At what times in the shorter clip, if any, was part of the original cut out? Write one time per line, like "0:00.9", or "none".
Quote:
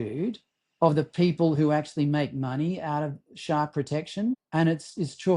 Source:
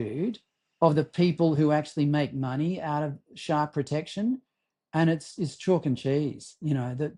0:04.4